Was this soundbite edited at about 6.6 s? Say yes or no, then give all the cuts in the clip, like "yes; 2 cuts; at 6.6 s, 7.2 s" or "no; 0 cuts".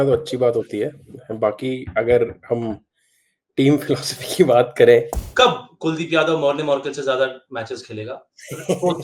no; 1 cut; at 5.2 s